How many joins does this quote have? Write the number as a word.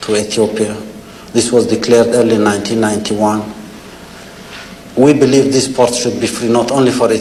zero